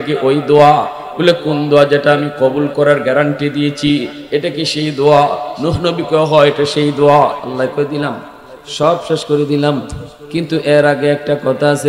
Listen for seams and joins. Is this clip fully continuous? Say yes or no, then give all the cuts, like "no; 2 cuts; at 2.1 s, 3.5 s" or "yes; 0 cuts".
no; 1 cut; at 7.4 s